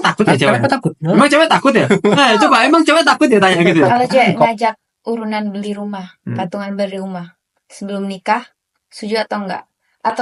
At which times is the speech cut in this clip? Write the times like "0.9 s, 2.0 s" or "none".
4.1 s